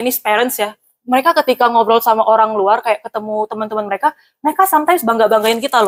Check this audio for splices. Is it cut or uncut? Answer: uncut